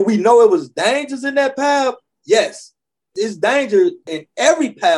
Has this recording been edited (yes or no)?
yes